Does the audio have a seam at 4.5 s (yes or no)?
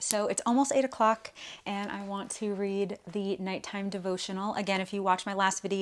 no